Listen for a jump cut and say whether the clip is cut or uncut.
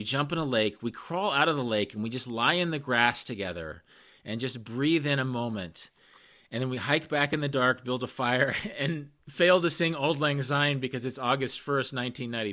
uncut